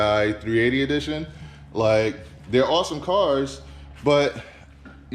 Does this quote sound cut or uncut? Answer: uncut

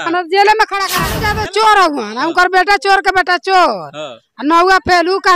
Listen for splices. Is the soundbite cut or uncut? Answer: cut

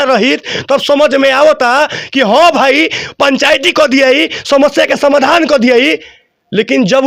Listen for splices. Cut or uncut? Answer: uncut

